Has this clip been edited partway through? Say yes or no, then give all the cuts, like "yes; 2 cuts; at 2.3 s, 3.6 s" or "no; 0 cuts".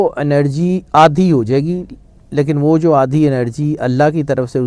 no; 0 cuts